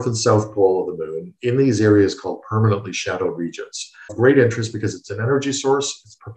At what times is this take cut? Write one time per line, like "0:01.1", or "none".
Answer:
0:04.1